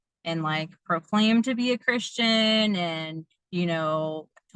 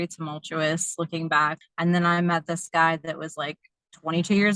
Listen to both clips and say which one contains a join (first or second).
second